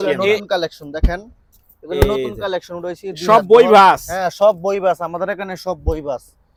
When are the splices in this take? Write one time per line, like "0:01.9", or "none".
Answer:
none